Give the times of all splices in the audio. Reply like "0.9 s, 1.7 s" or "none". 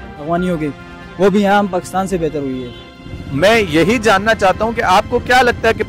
2.8 s